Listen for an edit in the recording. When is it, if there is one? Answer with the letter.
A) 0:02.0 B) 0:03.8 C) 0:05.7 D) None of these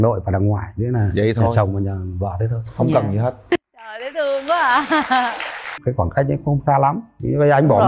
C